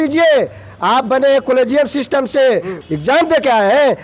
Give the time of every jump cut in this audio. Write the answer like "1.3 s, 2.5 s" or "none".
2.7 s